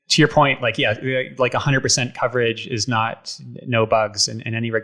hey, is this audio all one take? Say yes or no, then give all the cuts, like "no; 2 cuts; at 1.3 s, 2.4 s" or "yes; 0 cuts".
yes; 0 cuts